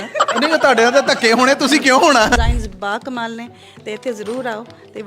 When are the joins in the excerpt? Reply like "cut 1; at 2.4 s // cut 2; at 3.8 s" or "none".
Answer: cut 1; at 2.4 s

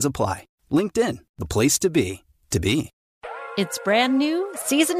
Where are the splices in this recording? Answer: cut 1; at 3.0 s

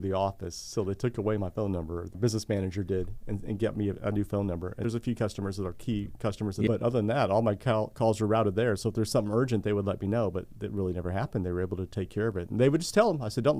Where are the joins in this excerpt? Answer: cut 1; at 2.2 s // cut 2; at 4.8 s // cut 3; at 6.7 s

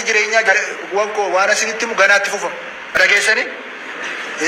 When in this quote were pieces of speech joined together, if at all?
cut 1; at 3.0 s

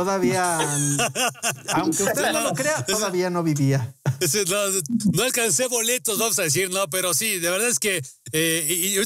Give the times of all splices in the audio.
none

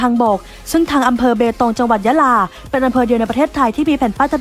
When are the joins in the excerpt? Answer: none

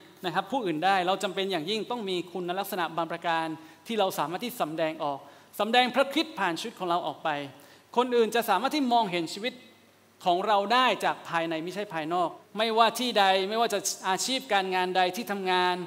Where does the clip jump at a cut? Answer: cut 1; at 12.4 s

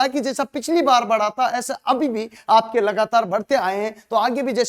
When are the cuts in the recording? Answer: none

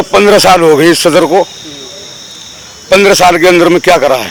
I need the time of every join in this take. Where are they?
none

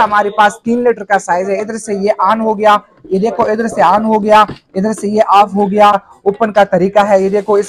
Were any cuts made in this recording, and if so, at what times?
cut 1; at 6.1 s

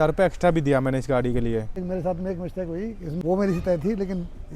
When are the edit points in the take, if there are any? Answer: cut 1; at 1.8 s // cut 2; at 3.1 s

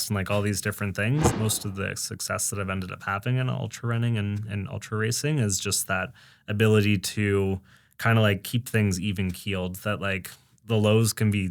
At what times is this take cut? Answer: cut 1; at 1.3 s

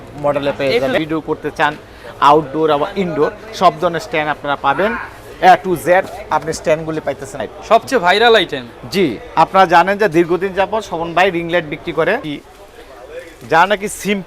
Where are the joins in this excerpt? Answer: cut 1; at 1.0 s // cut 2; at 7.5 s // cut 3; at 12.3 s

